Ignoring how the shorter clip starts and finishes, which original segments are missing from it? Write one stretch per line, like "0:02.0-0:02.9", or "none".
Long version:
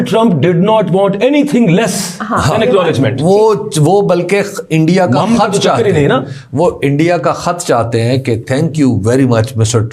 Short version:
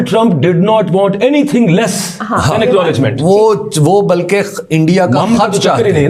none